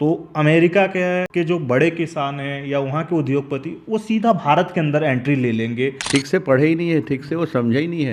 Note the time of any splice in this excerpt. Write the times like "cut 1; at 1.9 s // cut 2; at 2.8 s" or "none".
cut 1; at 1.3 s // cut 2; at 6.0 s